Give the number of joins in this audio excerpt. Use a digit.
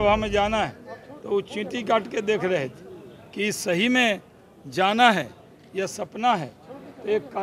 0